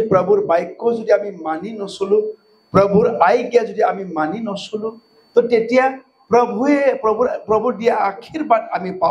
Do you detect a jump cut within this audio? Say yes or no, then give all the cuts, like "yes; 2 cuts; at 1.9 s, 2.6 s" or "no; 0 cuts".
no; 0 cuts